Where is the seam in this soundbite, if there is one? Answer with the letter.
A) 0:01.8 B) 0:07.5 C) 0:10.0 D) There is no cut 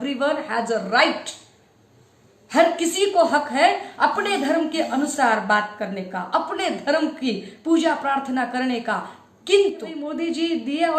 C